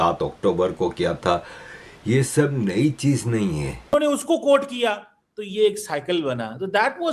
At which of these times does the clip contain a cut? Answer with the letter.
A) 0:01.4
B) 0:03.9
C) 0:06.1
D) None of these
B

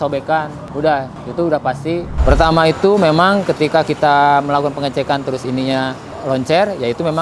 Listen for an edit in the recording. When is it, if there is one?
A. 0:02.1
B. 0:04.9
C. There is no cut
A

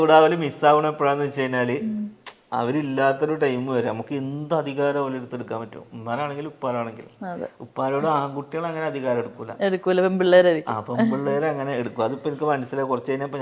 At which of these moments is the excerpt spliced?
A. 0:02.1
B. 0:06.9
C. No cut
C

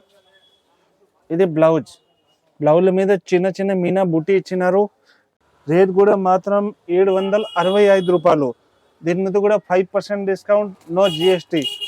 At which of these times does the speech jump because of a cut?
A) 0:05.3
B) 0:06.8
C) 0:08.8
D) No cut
A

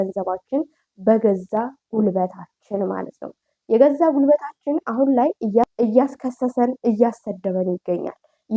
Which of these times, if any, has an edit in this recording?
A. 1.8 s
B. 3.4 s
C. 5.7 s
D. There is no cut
C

